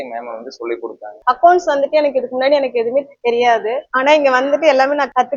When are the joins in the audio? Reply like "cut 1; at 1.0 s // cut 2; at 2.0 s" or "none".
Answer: cut 1; at 1.2 s